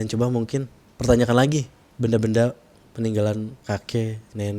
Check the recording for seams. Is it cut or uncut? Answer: cut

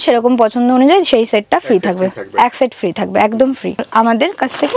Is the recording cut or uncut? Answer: cut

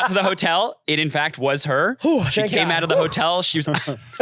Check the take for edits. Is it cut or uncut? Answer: uncut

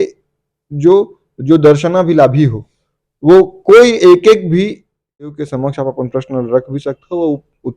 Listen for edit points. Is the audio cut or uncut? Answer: cut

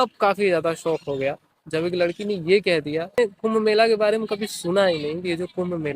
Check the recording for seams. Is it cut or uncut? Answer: cut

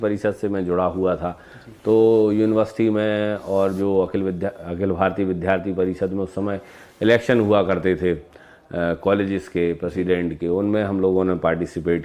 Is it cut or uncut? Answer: uncut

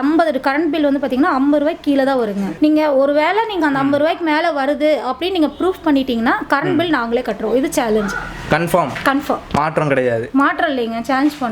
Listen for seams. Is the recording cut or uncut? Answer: cut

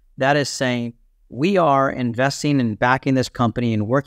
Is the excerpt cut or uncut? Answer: uncut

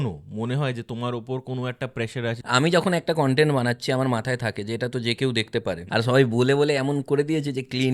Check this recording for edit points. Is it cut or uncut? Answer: cut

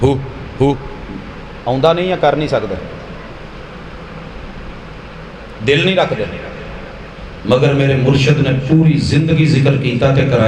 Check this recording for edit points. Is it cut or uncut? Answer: uncut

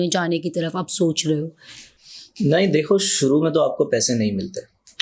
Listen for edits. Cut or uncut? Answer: uncut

